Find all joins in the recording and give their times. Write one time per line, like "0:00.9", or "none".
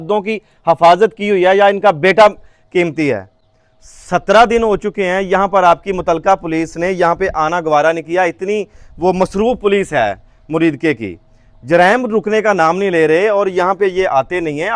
none